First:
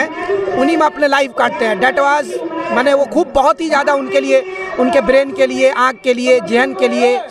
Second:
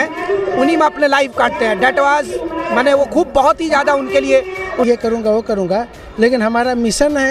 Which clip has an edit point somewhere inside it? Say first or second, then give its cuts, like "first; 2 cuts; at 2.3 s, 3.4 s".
second; 1 cut; at 4.8 s